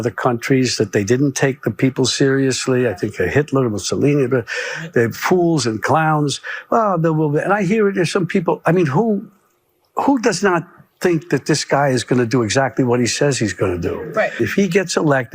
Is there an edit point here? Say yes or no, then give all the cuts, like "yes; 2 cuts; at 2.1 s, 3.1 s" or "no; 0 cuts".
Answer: yes; 1 cut; at 14.4 s